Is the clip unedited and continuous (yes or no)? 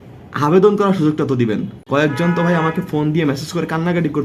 no